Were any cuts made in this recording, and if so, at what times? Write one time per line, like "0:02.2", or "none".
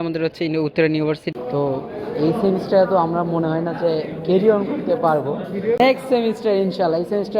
0:01.3
0:05.8